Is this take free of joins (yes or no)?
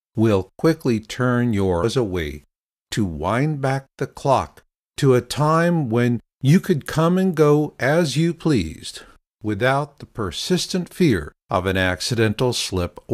yes